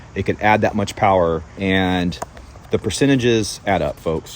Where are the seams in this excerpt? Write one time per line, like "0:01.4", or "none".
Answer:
0:01.5